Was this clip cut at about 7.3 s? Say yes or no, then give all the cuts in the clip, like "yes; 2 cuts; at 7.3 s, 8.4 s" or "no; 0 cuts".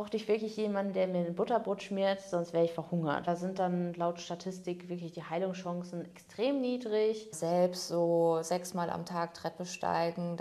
yes; 2 cuts; at 3.3 s, 7.3 s